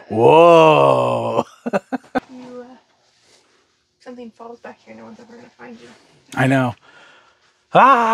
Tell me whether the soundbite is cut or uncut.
cut